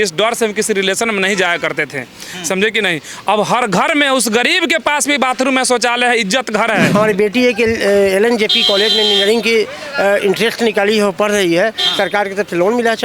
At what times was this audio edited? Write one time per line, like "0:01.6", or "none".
0:06.9